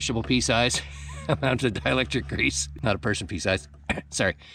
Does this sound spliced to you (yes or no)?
no